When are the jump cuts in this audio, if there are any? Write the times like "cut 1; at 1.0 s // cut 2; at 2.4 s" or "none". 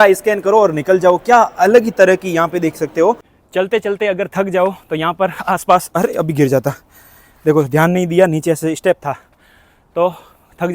cut 1; at 3.3 s